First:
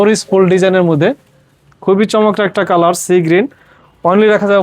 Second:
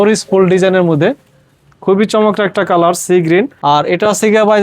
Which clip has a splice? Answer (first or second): second